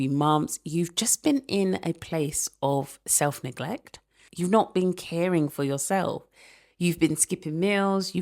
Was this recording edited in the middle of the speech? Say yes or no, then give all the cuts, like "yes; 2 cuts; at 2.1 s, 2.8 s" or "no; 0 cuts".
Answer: yes; 1 cut; at 4.2 s